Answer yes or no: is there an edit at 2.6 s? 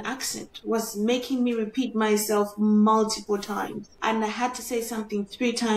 no